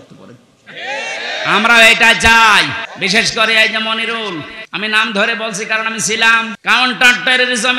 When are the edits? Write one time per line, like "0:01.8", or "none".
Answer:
0:02.8
0:04.6
0:06.6